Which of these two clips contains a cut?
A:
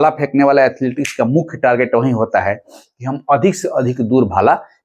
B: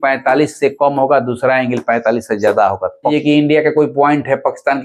B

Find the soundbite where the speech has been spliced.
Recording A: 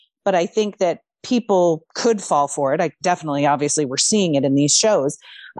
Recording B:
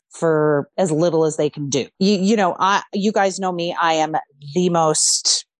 B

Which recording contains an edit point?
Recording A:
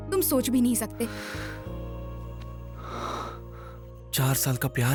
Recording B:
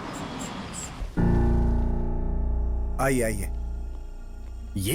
B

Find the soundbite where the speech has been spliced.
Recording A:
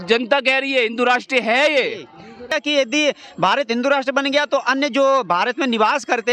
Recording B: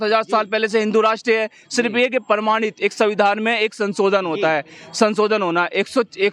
A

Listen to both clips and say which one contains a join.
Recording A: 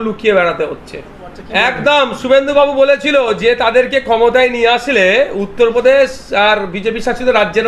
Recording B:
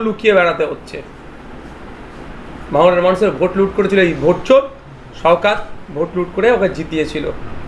A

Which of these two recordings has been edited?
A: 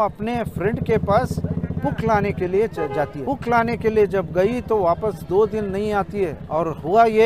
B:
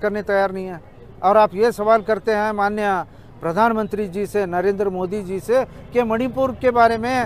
A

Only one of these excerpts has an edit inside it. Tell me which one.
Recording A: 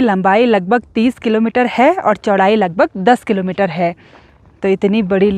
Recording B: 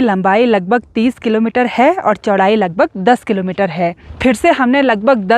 B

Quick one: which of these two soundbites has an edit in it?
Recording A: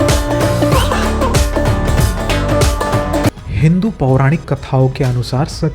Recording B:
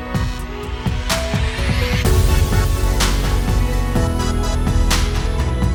A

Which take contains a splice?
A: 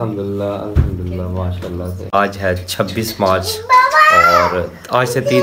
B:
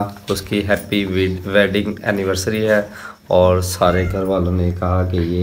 A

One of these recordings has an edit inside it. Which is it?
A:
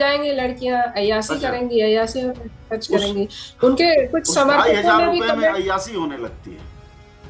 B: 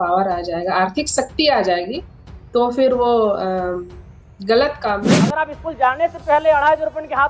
B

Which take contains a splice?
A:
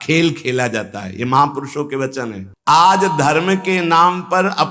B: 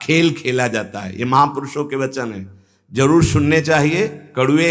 A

